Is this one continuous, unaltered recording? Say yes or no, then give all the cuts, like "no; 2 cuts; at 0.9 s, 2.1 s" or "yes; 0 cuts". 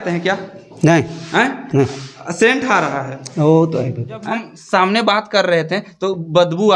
no; 1 cut; at 4.2 s